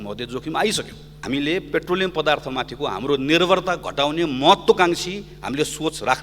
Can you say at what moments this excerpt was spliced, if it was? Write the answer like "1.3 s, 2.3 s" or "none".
1.2 s